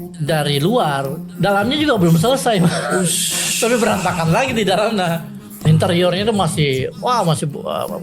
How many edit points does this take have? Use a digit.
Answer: 1